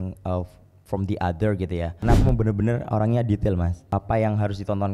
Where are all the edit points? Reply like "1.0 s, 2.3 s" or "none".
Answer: 2.1 s, 3.8 s